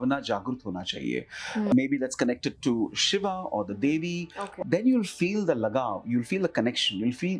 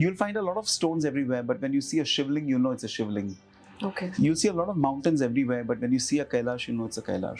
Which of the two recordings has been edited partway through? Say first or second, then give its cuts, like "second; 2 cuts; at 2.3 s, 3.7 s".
first; 2 cuts; at 1.7 s, 4.4 s